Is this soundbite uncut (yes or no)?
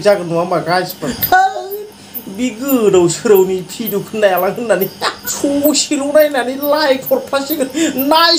no